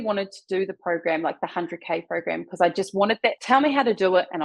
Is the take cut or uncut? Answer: cut